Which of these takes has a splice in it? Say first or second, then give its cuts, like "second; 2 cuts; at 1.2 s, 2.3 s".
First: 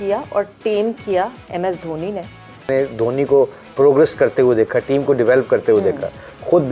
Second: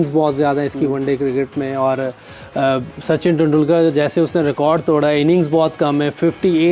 first; 1 cut; at 2.7 s